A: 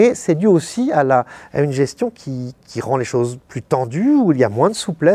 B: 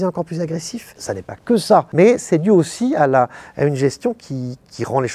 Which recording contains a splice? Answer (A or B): B